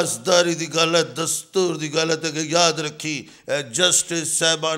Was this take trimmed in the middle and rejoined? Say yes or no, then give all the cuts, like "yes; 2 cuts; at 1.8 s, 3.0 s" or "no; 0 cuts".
no; 0 cuts